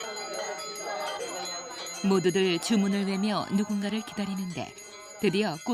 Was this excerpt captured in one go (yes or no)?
no